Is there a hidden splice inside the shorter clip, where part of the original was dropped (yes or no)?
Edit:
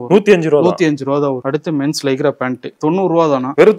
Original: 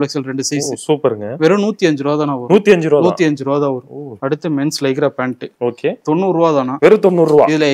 yes